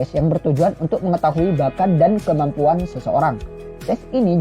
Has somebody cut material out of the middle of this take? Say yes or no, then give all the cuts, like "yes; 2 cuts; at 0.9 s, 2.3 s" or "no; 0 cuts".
yes; 1 cut; at 2.0 s